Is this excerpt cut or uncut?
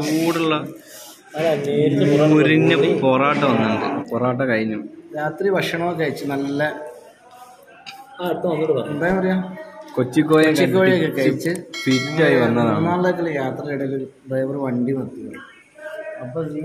cut